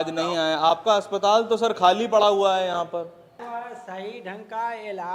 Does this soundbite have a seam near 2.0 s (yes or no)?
no